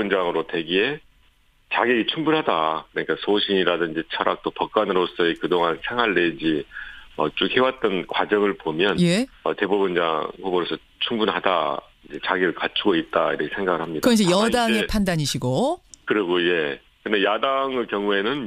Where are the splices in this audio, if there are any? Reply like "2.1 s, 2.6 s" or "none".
none